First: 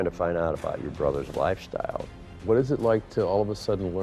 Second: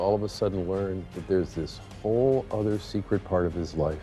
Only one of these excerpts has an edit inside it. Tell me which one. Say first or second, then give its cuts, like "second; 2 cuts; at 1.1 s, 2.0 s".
first; 2 cuts; at 1.3 s, 2.4 s